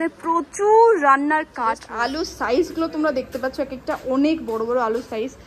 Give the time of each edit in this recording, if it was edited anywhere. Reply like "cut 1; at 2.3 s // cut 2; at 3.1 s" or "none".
cut 1; at 1.9 s